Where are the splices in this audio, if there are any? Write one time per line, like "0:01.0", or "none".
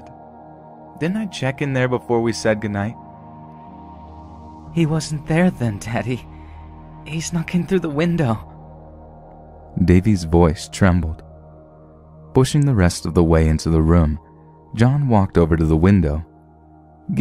0:01.5